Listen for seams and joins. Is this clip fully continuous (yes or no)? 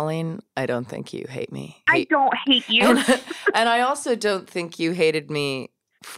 no